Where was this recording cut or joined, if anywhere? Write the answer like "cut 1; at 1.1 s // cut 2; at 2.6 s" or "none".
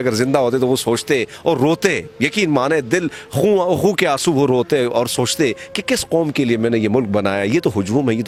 none